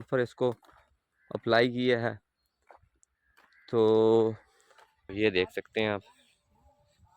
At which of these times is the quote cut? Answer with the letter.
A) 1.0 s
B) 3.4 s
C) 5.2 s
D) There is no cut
C